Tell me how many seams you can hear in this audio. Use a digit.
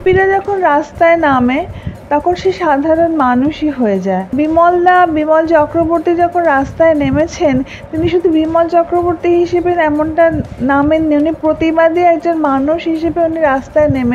2